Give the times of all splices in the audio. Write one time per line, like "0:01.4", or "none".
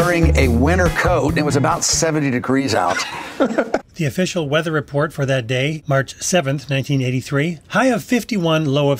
none